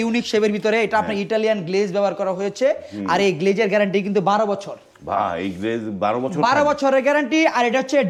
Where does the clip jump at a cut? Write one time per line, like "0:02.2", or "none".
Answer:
none